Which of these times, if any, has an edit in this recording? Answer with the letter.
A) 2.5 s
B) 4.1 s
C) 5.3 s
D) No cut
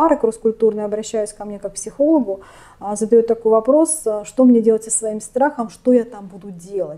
D